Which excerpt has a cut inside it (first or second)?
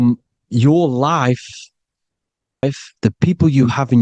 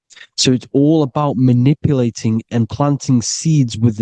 first